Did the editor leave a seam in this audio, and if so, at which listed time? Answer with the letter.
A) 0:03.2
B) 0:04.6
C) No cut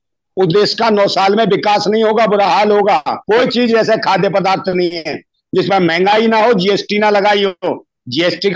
A